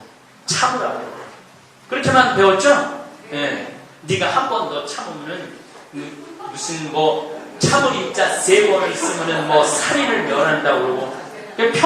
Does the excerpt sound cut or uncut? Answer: uncut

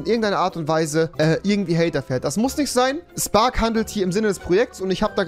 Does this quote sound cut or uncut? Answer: uncut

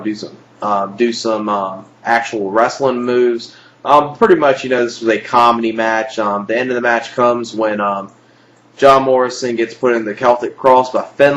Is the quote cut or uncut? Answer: cut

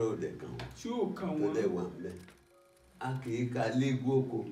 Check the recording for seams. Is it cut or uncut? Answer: cut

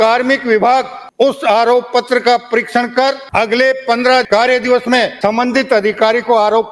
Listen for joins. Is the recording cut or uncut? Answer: cut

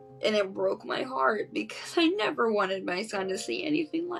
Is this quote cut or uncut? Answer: uncut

